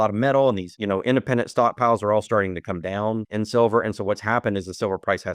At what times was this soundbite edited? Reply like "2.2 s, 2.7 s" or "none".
3.3 s